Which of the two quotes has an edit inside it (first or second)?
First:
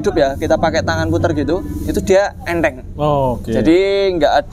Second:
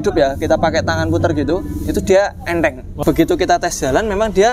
second